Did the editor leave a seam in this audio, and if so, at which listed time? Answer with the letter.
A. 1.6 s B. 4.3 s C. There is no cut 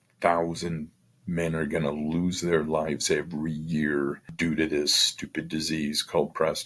B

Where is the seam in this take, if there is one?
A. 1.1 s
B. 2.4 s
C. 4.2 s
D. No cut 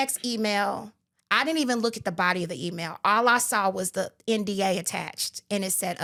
D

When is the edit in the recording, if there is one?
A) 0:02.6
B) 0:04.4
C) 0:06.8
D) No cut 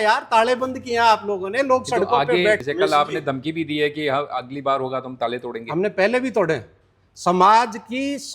A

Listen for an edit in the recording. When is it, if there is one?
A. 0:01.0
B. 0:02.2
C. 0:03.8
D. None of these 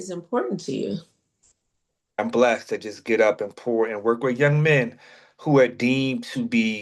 B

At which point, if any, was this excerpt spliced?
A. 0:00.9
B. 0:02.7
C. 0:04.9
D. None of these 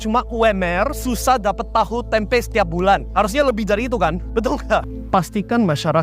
C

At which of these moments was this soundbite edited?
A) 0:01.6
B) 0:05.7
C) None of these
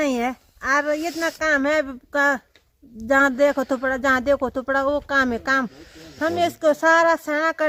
C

